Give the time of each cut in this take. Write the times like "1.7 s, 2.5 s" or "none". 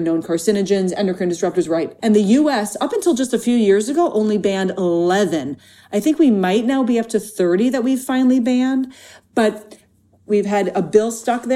1.9 s, 10.2 s